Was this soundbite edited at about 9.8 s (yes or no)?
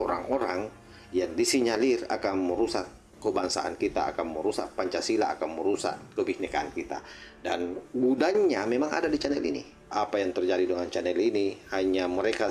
yes